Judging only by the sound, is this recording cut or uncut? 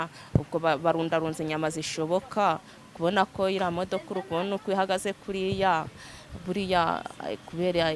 uncut